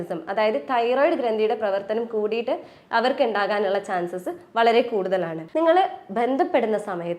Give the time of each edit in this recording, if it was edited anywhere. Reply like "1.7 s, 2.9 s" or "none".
5.4 s

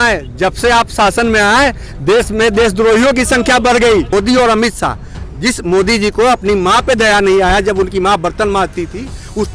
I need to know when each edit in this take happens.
4.1 s

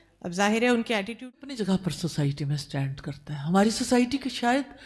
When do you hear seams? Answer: 1.5 s

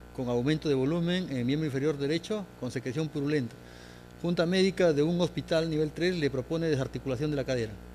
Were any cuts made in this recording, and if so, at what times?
none

